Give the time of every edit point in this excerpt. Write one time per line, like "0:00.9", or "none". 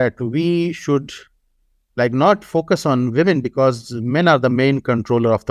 none